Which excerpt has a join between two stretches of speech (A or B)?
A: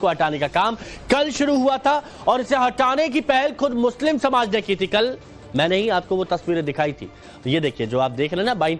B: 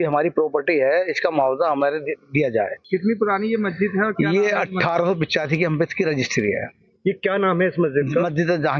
A